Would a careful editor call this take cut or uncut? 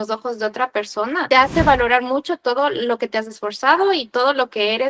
uncut